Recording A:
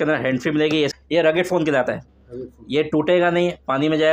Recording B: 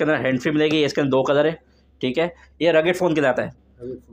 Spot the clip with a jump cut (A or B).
A